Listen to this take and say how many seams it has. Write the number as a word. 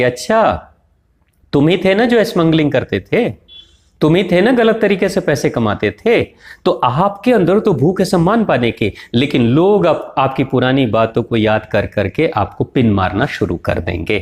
zero